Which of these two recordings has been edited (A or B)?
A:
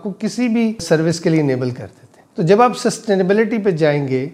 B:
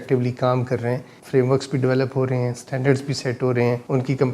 B